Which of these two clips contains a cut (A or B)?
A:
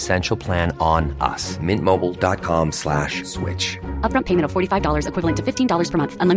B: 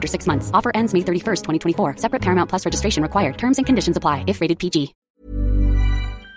B